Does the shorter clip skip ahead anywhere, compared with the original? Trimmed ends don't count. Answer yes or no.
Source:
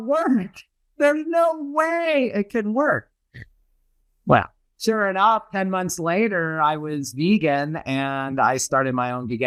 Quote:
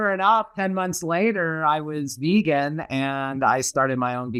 no